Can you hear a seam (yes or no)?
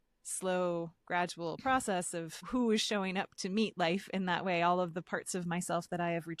yes